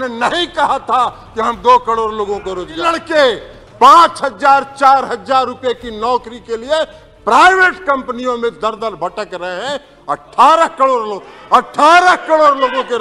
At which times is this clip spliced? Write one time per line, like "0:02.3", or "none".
0:02.8